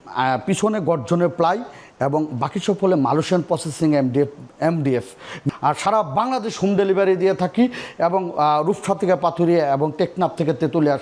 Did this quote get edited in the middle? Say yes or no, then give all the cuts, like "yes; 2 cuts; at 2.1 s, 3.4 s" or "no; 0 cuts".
yes; 1 cut; at 5.4 s